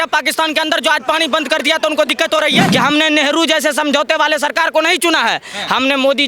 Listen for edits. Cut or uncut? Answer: cut